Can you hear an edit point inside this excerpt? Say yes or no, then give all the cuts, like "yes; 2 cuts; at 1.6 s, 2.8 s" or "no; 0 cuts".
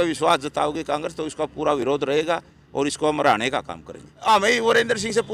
yes; 1 cut; at 4.2 s